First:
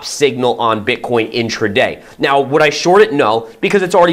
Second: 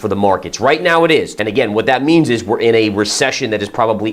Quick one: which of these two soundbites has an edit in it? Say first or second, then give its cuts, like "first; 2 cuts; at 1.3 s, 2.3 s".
second; 1 cut; at 1.3 s